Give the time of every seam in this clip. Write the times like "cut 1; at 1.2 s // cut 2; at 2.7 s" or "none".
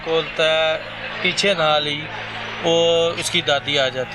none